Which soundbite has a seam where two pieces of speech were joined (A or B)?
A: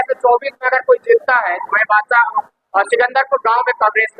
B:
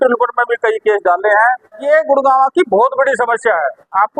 B